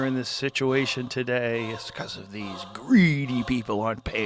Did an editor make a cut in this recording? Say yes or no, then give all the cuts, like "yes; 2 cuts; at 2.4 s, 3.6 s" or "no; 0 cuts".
no; 0 cuts